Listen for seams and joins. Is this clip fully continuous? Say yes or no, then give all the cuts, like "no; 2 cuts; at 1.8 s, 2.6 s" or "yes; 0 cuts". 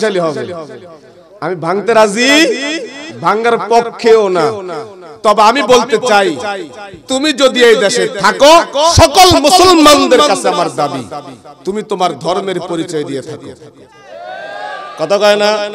yes; 0 cuts